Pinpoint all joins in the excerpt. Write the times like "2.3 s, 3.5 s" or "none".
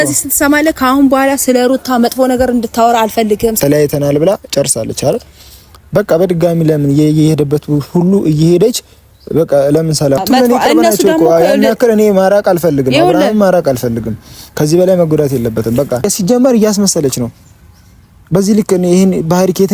3.6 s, 10.2 s, 16.1 s